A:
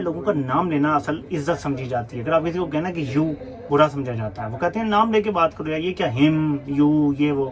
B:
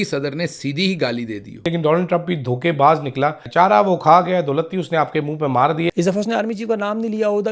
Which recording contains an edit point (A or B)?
B